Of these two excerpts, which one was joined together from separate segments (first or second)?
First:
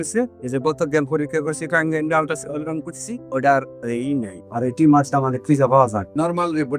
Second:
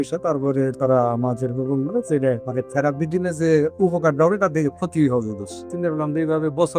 second